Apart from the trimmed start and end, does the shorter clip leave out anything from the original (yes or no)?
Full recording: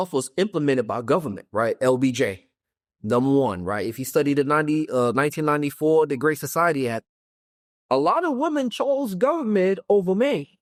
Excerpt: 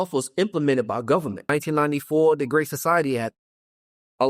yes